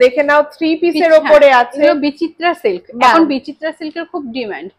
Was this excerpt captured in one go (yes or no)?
yes